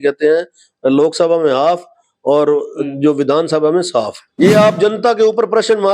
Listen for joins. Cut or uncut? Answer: cut